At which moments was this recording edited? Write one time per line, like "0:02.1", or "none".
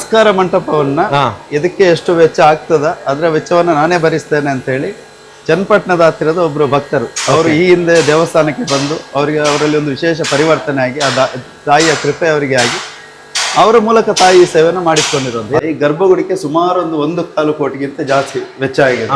0:15.6